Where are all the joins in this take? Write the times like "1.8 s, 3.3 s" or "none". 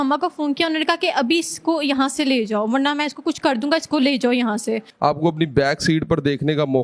4.9 s